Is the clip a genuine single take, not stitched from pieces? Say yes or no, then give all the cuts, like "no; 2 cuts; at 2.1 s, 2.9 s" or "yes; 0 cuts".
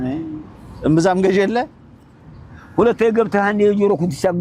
yes; 0 cuts